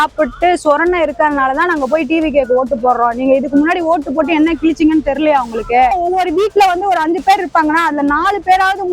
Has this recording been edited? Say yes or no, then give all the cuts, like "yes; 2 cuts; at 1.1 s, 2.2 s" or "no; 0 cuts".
yes; 1 cut; at 5.9 s